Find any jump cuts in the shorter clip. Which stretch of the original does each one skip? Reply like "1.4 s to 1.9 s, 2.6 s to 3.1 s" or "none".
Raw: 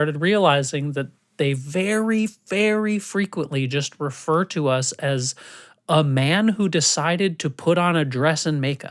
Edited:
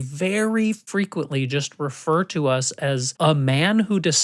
2.4 s to 3.1 s, 5.3 s to 5.8 s